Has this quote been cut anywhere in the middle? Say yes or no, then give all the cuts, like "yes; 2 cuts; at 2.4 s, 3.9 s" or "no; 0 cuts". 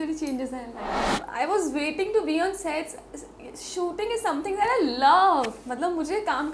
yes; 1 cut; at 1.1 s